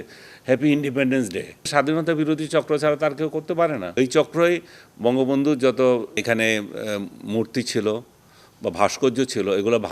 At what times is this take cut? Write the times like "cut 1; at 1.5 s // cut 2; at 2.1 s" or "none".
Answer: cut 1; at 1.7 s // cut 2; at 3.9 s

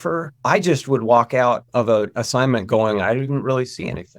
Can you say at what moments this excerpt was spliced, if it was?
cut 1; at 1.7 s

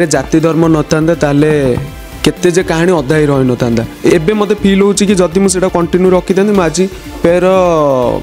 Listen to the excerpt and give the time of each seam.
cut 1; at 4.1 s // cut 2; at 7.1 s

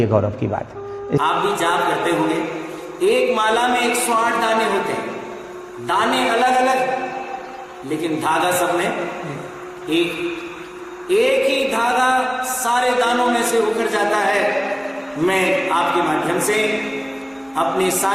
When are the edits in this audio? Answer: cut 1; at 1.2 s

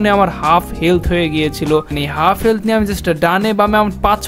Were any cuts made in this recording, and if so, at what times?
cut 1; at 2.0 s

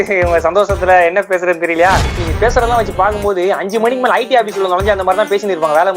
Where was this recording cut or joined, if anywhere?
cut 1; at 2.3 s

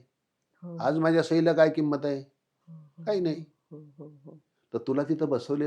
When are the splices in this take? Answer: none

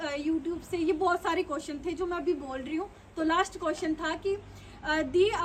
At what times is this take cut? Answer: none

